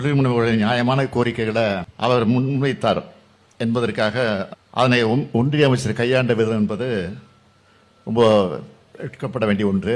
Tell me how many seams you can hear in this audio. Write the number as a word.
two